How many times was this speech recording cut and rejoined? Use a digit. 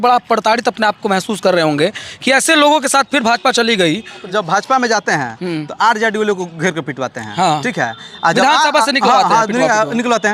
1